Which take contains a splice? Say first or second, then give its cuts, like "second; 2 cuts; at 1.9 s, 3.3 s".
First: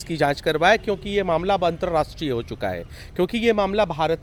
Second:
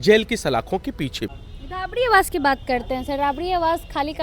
second; 1 cut; at 1.4 s